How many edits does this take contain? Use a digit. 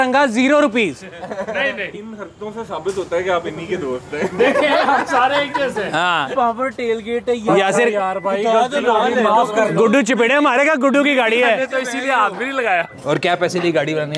3